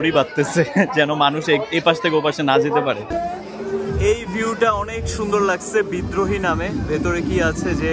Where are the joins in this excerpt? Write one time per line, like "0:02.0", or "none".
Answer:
0:03.1